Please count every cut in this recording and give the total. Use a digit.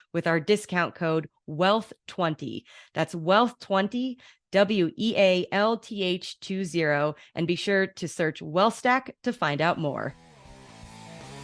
1